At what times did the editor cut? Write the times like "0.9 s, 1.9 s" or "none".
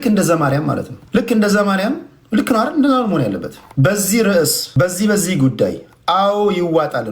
0.9 s, 3.6 s, 4.6 s